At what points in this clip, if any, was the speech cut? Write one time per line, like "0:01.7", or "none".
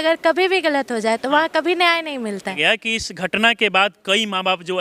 0:02.5

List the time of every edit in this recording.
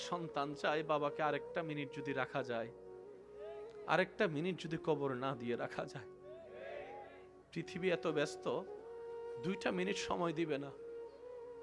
0:10.7

